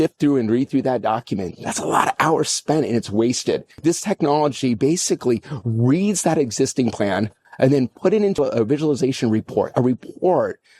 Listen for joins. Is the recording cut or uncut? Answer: cut